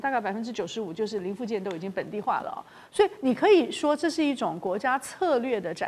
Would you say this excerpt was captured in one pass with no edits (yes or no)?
yes